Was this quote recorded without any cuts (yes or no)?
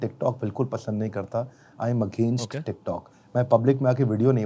yes